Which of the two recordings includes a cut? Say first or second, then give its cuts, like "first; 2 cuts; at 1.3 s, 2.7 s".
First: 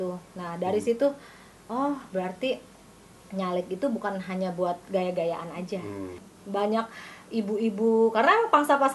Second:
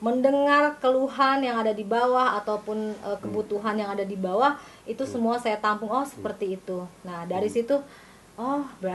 first; 1 cut; at 6.3 s